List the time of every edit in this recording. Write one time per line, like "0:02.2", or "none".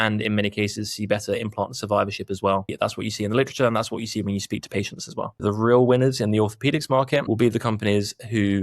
0:02.7
0:05.4
0:07.2